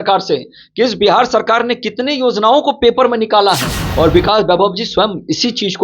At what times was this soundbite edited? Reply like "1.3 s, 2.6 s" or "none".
3.8 s